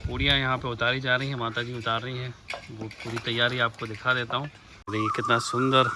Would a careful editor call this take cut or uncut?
cut